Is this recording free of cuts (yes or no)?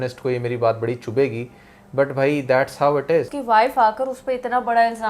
no